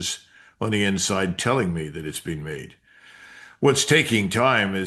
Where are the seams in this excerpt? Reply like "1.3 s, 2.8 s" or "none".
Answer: none